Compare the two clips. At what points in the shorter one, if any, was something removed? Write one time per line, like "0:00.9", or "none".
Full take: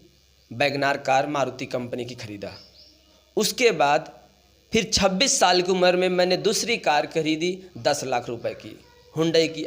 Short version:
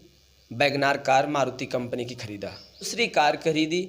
0:02.9